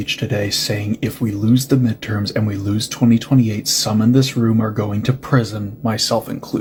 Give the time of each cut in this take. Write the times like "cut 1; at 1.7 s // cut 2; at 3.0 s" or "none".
none